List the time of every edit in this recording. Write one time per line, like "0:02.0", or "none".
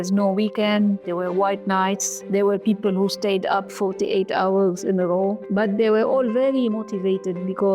0:02.1
0:03.7
0:05.4